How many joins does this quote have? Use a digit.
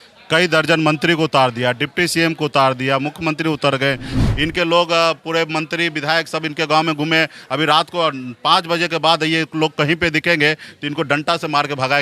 1